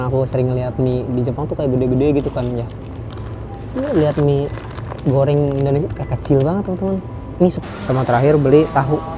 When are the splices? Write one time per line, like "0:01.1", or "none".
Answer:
0:07.6